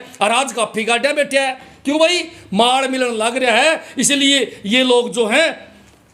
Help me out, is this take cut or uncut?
uncut